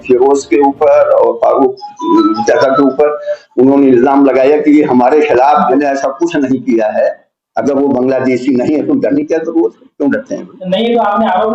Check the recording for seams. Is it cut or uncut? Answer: cut